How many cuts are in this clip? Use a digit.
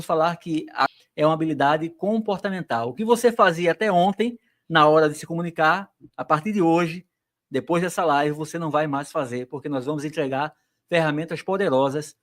1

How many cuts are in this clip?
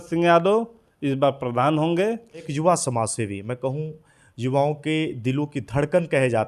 1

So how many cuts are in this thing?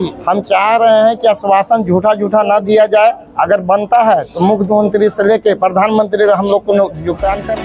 0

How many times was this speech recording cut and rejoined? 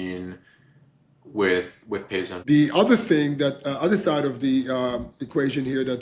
1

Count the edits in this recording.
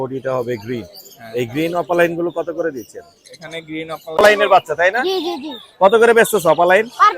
1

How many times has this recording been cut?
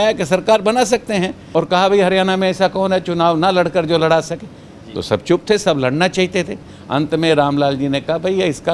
1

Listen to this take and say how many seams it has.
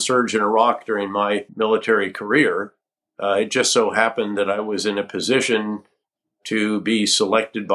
0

